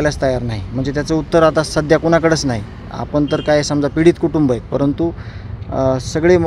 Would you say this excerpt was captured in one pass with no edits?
yes; 0 cuts

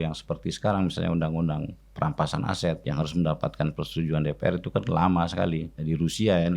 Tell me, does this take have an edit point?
yes; 2 cuts; at 2.8 s, 5.7 s

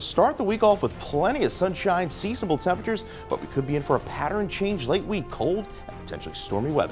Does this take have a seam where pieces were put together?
no; 0 cuts

